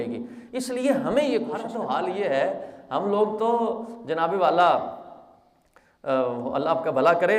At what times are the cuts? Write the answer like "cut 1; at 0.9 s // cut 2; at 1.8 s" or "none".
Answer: cut 1; at 1.7 s